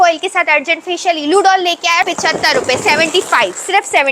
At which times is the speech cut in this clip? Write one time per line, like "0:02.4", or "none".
0:02.1